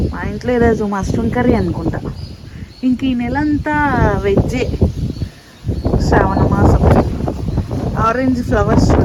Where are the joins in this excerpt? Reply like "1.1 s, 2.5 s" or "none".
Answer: none